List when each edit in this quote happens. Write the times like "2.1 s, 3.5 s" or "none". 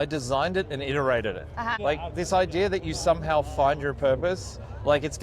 1.8 s